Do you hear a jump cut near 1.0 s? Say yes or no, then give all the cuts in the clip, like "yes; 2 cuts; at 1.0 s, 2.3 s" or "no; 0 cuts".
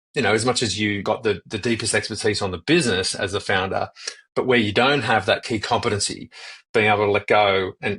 yes; 2 cuts; at 1.0 s, 5.4 s